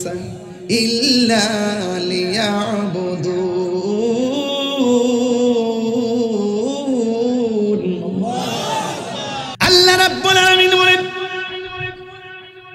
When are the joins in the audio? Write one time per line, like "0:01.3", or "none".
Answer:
0:09.5